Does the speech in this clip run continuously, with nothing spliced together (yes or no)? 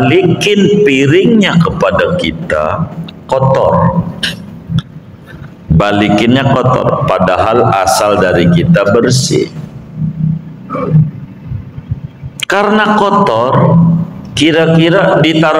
yes